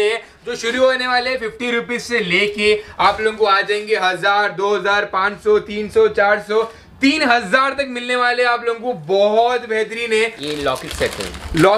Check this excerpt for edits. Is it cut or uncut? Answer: cut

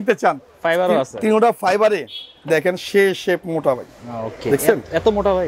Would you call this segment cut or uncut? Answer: uncut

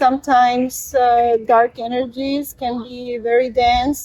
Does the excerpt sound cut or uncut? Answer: uncut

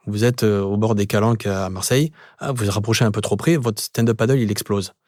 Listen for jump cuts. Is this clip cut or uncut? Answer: uncut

